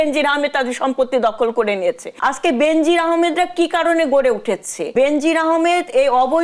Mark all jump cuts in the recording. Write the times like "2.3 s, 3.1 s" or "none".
2.1 s, 4.8 s